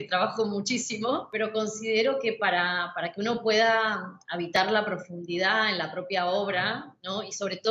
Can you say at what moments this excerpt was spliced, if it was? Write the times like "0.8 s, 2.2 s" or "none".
1.2 s

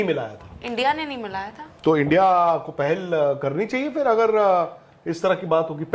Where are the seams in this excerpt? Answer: none

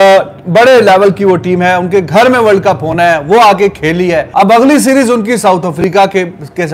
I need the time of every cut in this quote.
4.3 s

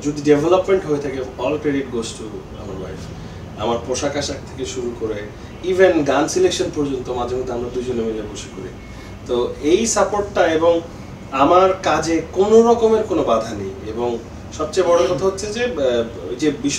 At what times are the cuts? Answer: none

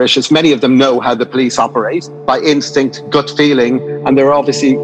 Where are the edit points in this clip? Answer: 2.1 s, 3.9 s

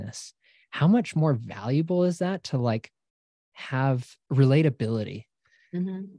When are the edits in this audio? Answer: 4.2 s

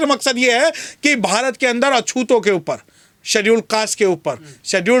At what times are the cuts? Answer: none

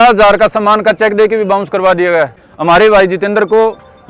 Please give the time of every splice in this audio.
2.4 s

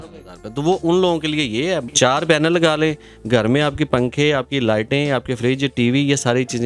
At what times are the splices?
1.8 s

